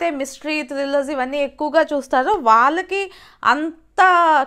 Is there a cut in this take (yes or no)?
no